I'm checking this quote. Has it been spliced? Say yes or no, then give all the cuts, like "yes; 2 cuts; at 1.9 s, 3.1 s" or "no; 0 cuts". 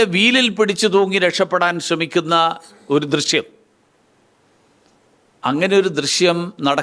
no; 0 cuts